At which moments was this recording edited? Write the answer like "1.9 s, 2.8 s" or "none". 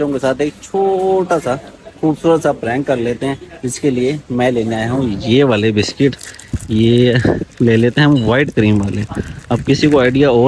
none